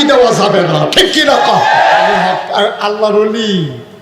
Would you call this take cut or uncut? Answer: cut